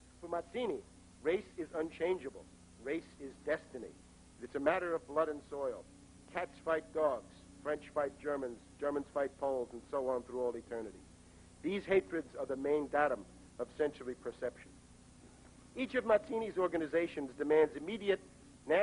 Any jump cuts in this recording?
no; 0 cuts

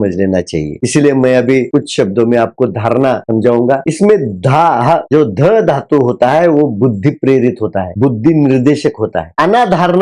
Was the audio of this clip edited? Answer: no; 0 cuts

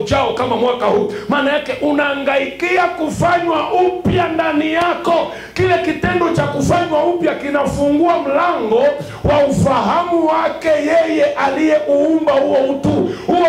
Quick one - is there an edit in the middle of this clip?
no; 0 cuts

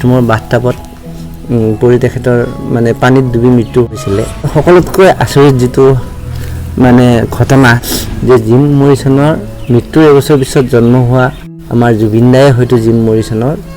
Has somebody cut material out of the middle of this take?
yes; 2 cuts; at 4.5 s, 7.8 s

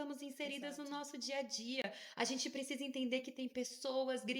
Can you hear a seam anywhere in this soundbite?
no; 0 cuts

